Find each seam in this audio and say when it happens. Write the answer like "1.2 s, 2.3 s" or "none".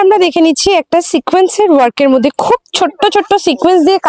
none